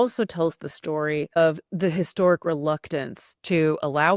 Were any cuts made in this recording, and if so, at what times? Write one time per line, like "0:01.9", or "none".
0:01.4